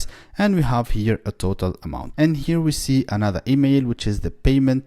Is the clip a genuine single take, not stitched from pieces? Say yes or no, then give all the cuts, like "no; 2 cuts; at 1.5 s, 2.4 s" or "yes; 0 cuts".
no; 1 cut; at 2.0 s